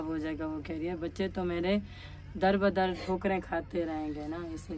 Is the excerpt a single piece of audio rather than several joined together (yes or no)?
yes